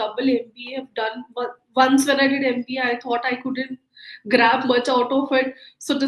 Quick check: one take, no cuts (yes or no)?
yes